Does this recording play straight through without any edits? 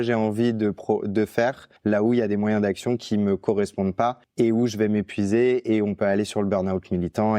no; 2 cuts; at 1.7 s, 4.2 s

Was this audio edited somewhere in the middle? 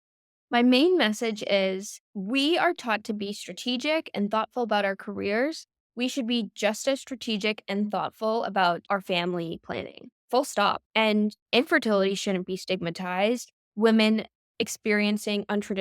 yes; 2 cuts; at 8.8 s, 10.8 s

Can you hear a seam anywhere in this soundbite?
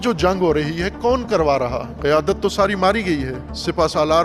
no; 0 cuts

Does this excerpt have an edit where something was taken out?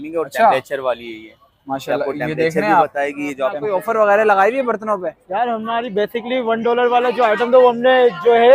yes; 1 cut; at 3.6 s

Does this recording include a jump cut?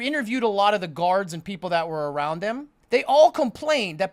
yes; 1 cut; at 2.7 s

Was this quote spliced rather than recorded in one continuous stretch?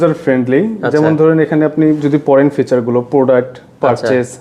no; 0 cuts

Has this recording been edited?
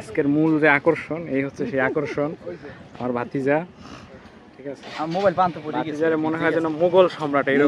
no; 0 cuts

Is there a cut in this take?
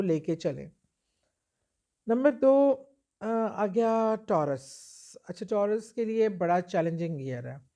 no; 0 cuts

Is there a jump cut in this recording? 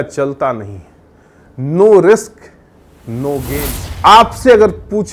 yes; 1 cut; at 3.8 s

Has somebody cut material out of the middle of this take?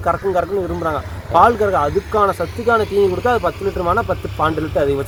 no; 0 cuts

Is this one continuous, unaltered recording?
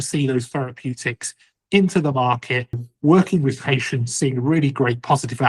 no; 1 cut; at 2.9 s

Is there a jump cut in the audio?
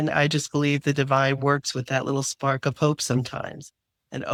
no; 0 cuts

